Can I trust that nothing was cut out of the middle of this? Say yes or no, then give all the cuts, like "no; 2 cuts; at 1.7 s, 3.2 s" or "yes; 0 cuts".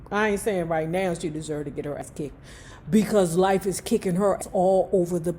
no; 2 cuts; at 2.0 s, 4.4 s